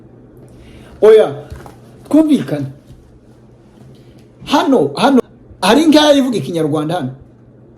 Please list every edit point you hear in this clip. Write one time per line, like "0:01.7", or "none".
0:05.2